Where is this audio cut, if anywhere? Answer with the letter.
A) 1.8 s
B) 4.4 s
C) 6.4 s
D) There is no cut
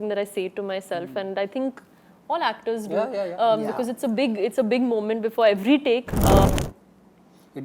C